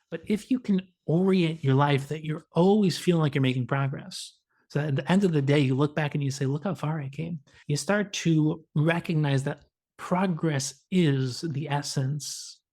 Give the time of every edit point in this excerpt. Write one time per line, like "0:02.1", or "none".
0:07.5
0:08.6